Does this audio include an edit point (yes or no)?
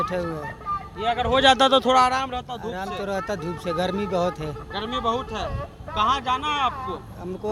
no